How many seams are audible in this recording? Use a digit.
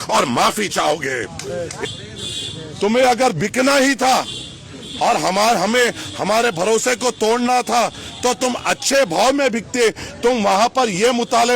1